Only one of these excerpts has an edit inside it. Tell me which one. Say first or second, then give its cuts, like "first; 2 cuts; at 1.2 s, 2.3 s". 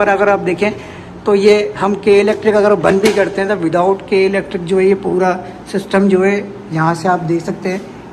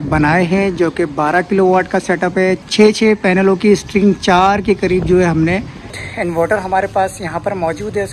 second; 2 cuts; at 2.6 s, 6.0 s